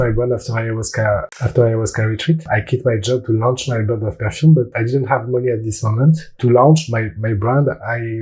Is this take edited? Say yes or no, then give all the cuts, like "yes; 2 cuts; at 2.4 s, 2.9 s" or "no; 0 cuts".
yes; 4 cuts; at 1.3 s, 2.4 s, 4.7 s, 6.3 s